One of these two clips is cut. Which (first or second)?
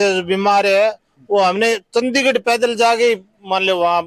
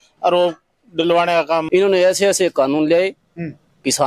second